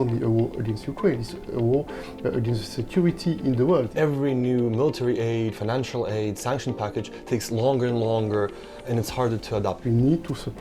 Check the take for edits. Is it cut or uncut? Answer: cut